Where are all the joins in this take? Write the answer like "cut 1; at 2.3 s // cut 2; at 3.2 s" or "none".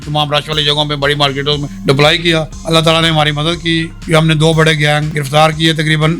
cut 1; at 1.7 s // cut 2; at 2.6 s // cut 3; at 3.9 s // cut 4; at 5.1 s